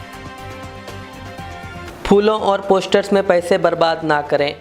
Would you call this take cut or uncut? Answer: cut